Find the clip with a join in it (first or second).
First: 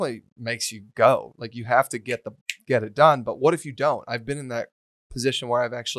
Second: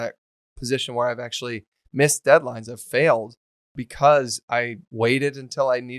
second